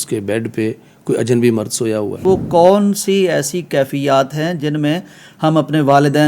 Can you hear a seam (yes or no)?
yes